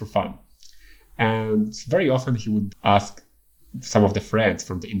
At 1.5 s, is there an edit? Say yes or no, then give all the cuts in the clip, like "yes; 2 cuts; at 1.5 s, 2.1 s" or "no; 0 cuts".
no; 1 cut; at 2.7 s